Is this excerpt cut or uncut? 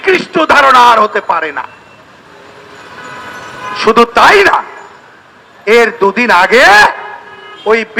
uncut